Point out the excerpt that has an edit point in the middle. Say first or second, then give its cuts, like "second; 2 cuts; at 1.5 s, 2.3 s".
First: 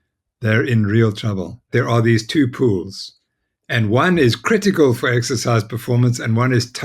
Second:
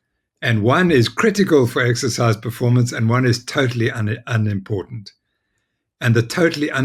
first; 1 cut; at 1.7 s